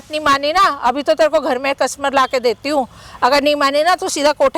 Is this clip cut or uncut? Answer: uncut